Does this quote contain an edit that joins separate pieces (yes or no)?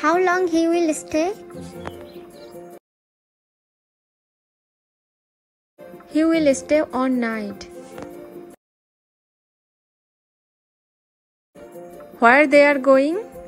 no